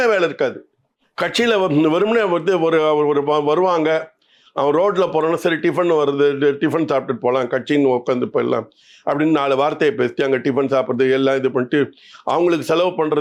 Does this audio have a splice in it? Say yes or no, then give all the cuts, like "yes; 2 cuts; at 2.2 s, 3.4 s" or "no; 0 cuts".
no; 0 cuts